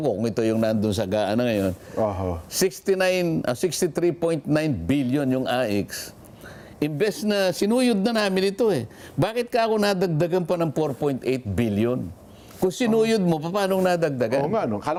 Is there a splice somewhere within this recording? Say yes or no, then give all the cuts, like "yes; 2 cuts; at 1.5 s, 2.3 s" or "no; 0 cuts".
no; 0 cuts